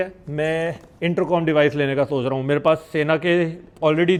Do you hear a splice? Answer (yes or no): no